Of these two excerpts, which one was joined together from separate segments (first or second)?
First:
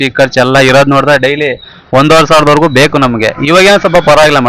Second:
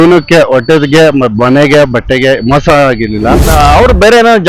second